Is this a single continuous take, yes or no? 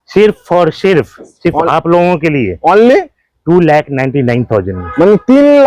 yes